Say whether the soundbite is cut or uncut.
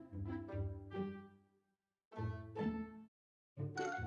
uncut